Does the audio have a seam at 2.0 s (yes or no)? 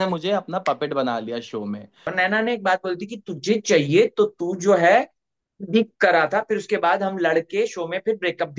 yes